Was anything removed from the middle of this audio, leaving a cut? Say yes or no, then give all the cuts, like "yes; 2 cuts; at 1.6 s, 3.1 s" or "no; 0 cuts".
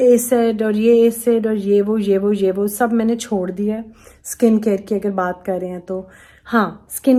no; 0 cuts